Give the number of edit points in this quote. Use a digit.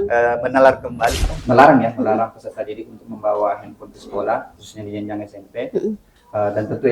1